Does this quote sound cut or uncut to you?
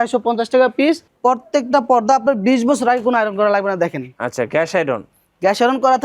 cut